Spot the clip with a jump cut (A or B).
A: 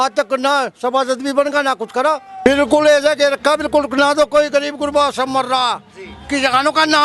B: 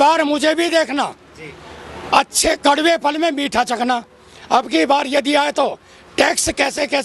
A